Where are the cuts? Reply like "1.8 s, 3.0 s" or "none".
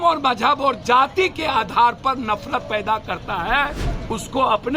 3.9 s